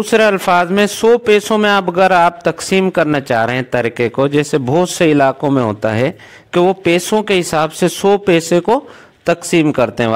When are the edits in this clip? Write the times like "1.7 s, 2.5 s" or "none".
none